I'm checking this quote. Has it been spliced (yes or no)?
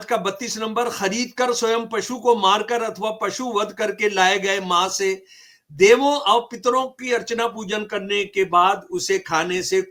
no